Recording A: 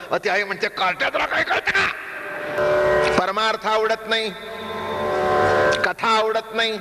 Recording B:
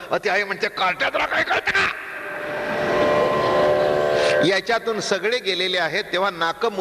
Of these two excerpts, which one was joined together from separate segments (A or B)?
A